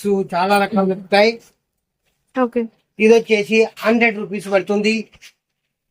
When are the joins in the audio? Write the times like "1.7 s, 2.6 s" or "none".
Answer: none